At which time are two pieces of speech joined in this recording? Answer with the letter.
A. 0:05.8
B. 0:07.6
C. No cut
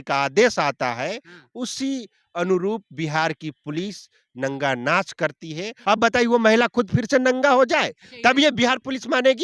A